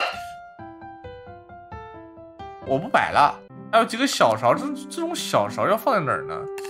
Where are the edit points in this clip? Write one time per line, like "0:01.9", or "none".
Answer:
0:03.5

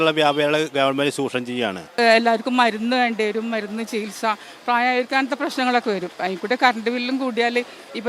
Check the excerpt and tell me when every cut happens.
0:01.9

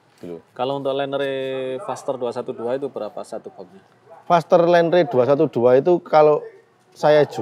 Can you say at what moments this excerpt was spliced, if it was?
none

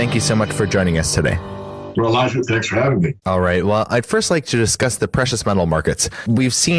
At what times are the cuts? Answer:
0:03.7

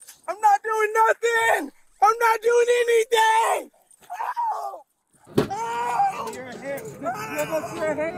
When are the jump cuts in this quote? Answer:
none

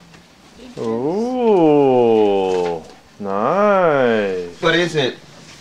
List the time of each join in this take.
none

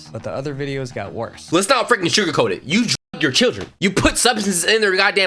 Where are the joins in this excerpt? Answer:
0:01.5

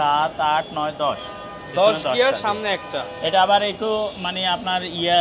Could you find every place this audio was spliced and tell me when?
none

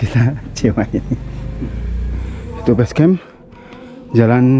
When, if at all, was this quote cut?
0:02.5

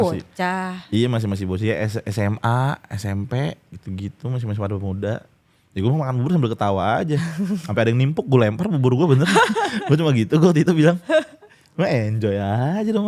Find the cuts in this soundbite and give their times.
none

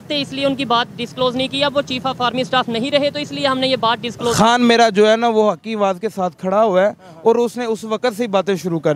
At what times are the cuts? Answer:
none

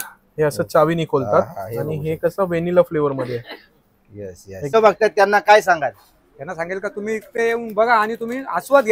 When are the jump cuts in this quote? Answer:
0:04.7

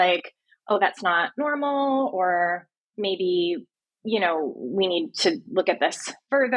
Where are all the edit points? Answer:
none

